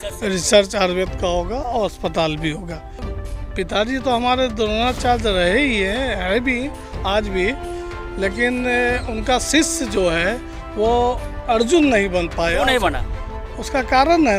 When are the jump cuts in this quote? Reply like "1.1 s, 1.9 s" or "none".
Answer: 3.1 s